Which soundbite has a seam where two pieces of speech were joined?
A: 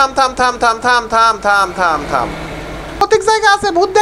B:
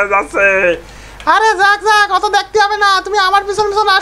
A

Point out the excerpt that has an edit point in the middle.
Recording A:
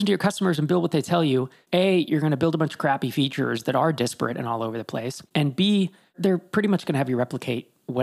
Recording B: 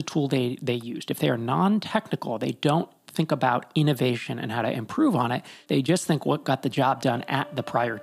B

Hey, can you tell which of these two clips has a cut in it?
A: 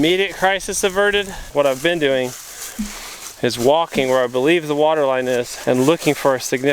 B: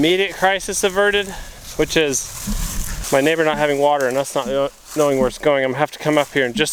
A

